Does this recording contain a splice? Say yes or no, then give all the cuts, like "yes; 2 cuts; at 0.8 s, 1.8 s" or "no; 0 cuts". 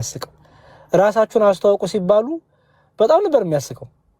no; 0 cuts